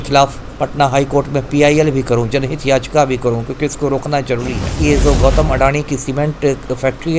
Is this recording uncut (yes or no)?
no